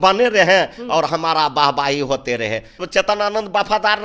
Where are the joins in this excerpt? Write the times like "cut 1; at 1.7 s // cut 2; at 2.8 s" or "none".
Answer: cut 1; at 2.8 s

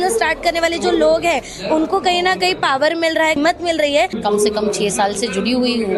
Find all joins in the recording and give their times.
cut 1; at 3.4 s // cut 2; at 4.1 s

